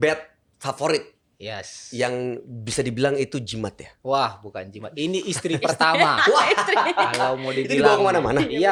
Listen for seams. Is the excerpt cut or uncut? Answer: uncut